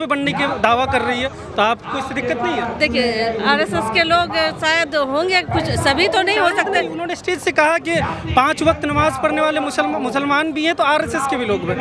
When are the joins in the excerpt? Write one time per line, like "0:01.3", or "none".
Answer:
none